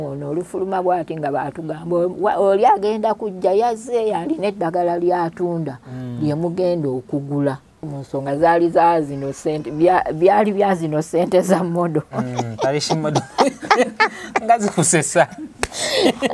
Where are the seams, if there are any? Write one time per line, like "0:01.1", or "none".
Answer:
0:08.0